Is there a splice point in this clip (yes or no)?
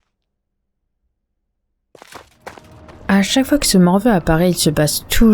yes